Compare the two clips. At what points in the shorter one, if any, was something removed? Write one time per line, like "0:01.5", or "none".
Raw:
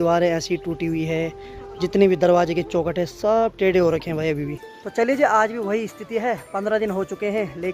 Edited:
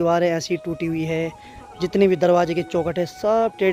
none

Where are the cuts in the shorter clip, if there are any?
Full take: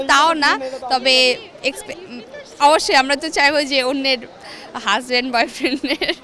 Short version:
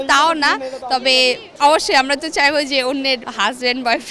0:01.5
0:03.3

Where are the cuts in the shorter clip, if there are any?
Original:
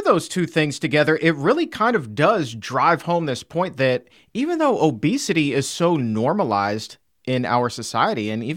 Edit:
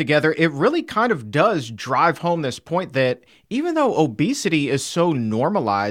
none

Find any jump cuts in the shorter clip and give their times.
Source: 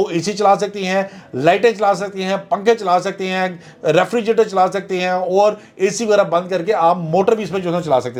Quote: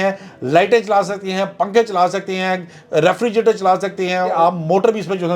0:04.3

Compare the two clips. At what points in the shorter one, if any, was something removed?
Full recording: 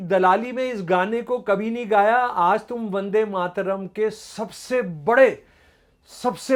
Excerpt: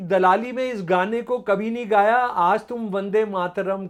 none

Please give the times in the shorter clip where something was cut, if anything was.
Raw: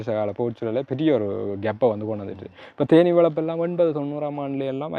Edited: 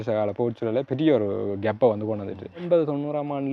0:02.6

